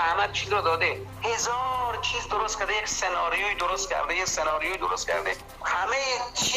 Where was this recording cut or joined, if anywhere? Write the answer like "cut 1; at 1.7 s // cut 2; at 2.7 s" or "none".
cut 1; at 1.1 s // cut 2; at 5.5 s